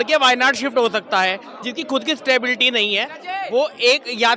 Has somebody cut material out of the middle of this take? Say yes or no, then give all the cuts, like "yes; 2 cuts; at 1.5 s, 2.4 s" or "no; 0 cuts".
no; 0 cuts